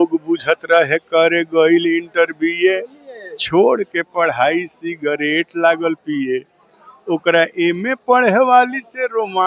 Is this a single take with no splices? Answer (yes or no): yes